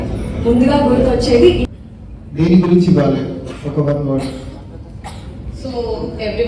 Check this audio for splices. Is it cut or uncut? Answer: cut